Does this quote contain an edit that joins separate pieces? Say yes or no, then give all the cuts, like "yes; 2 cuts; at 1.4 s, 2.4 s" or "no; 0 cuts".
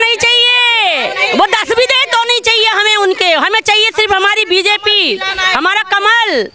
no; 0 cuts